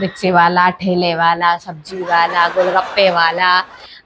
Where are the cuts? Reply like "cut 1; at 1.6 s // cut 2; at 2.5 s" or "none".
none